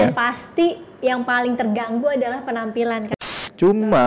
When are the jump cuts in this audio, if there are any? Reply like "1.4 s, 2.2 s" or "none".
3.1 s